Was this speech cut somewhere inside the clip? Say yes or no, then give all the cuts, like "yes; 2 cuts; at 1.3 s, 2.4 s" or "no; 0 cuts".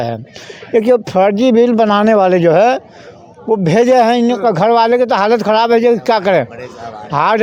no; 0 cuts